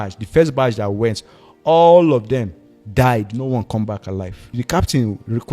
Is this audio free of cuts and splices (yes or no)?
no